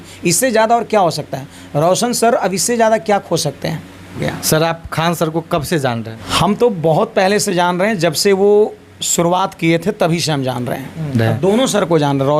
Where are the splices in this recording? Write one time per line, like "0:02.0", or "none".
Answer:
0:04.3
0:06.2
0:11.1